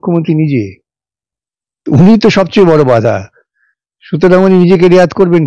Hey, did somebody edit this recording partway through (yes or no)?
no